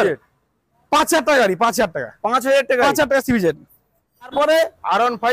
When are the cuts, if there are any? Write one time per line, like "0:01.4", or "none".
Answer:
0:04.3

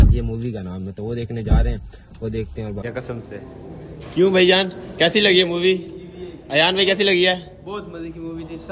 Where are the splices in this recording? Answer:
0:01.0
0:02.8

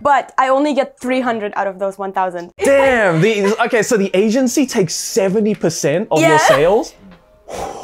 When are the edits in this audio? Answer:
none

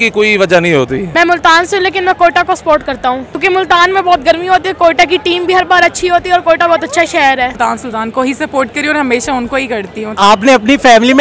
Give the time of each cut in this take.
0:01.1
0:03.4
0:07.6
0:10.2

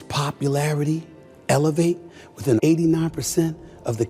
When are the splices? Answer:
0:02.6

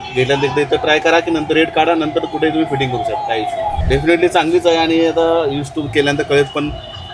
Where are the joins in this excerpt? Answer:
0:03.8

